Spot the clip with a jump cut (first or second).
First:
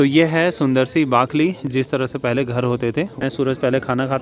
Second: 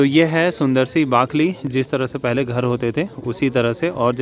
first